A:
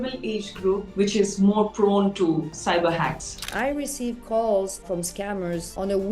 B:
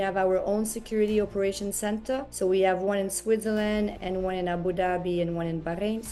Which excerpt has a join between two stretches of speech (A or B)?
A